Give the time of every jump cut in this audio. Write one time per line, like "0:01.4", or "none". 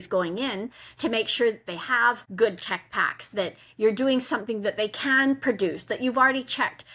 0:02.3

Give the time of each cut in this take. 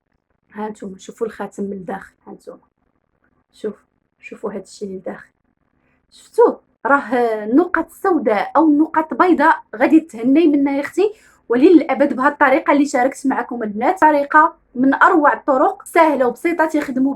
0:14.0
0:15.8

